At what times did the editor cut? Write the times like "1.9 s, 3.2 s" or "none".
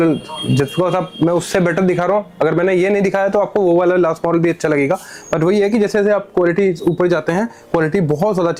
none